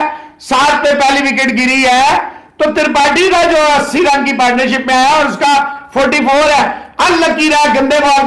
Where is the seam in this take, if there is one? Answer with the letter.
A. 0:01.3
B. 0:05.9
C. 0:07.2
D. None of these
D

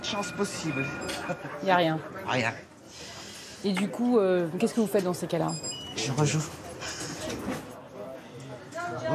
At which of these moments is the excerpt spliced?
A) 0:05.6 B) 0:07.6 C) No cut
B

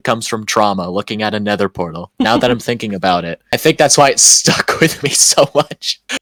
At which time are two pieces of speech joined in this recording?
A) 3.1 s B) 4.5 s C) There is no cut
C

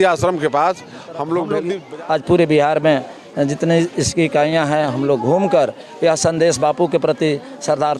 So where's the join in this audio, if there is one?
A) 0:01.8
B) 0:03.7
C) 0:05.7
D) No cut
A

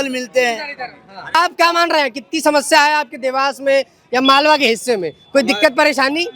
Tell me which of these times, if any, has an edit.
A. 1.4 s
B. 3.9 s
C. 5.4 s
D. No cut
A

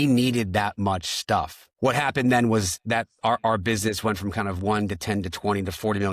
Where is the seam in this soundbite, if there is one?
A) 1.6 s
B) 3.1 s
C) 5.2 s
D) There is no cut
A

